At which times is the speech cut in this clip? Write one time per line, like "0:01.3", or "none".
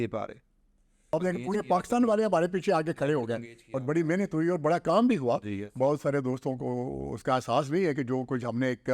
0:01.1